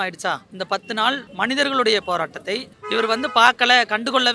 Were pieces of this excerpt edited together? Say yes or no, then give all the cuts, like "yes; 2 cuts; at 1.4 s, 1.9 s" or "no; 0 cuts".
no; 0 cuts